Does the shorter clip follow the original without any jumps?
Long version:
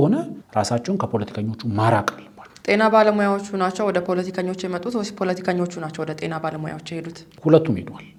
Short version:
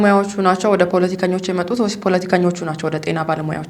yes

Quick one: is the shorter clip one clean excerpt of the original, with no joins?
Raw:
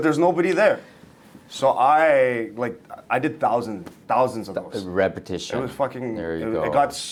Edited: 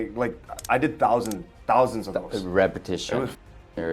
yes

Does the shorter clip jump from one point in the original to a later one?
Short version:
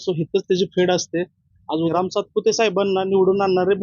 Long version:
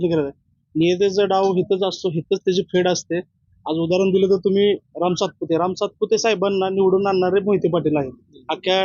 yes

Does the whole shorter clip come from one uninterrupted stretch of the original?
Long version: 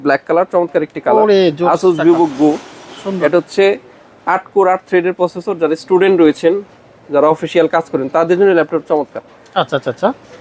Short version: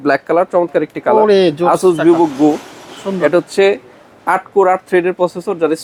yes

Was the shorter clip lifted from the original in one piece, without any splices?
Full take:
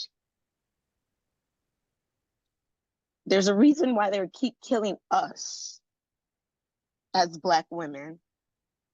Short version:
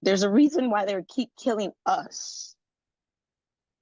yes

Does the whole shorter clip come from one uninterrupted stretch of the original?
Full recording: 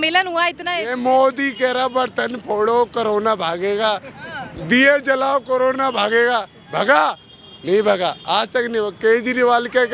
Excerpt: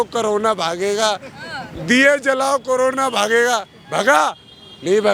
yes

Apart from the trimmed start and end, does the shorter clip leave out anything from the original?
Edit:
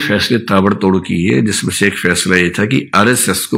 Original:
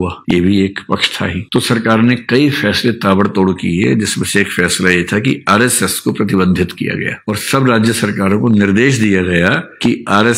no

